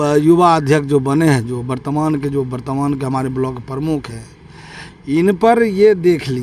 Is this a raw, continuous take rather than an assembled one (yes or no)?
yes